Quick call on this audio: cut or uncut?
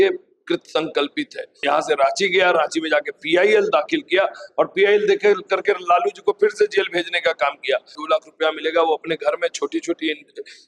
cut